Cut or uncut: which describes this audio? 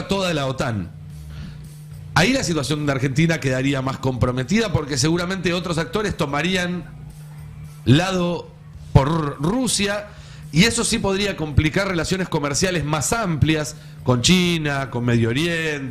uncut